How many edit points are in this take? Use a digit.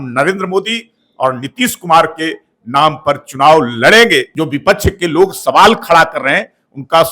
1